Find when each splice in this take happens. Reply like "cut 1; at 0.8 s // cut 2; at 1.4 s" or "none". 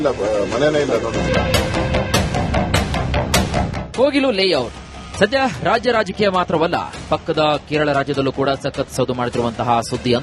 cut 1; at 1.0 s